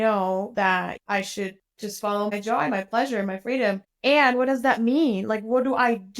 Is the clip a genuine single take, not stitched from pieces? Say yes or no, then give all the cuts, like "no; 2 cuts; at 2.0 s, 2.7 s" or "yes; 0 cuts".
no; 2 cuts; at 1.0 s, 2.3 s